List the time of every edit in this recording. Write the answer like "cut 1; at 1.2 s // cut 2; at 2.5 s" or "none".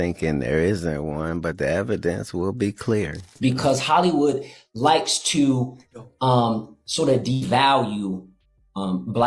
cut 1; at 3.3 s